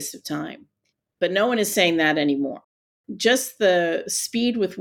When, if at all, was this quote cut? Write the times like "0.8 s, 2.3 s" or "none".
1.1 s, 3.0 s